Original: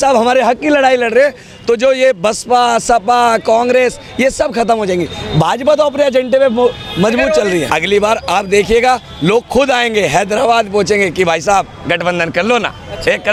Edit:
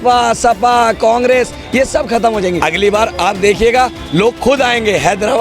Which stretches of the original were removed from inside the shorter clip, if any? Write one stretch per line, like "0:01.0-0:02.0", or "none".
0:05.1-0:07.7